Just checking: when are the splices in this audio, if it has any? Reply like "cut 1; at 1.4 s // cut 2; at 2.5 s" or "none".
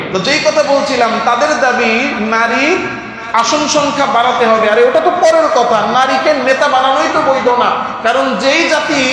none